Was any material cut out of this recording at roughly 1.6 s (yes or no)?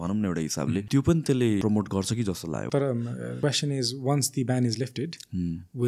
yes